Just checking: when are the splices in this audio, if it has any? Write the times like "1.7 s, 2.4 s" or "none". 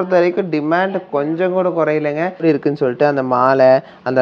2.4 s